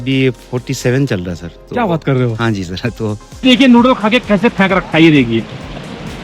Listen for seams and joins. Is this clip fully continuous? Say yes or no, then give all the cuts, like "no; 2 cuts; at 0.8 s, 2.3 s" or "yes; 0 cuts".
no; 1 cut; at 3.4 s